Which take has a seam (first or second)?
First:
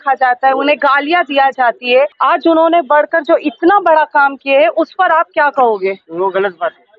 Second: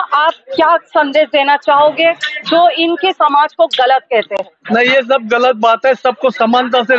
first